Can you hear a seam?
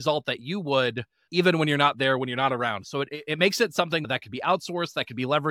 no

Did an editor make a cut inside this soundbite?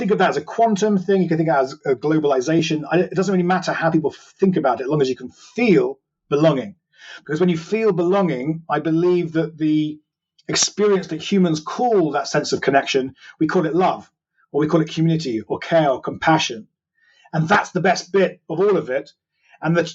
no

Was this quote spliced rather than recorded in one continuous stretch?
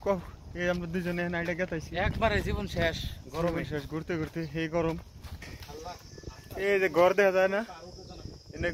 yes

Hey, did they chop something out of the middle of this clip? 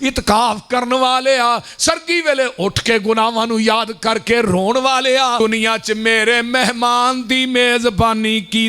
yes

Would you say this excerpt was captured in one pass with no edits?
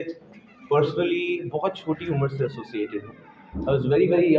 yes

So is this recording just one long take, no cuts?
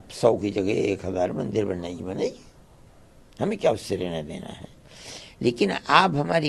yes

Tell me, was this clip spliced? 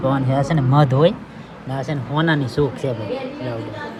no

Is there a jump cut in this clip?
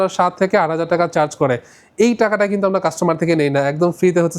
no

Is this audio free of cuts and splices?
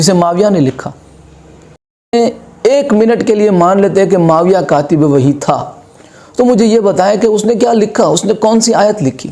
no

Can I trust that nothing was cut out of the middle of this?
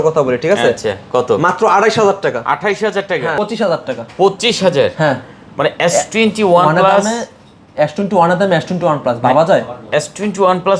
no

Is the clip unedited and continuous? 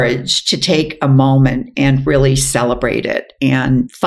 yes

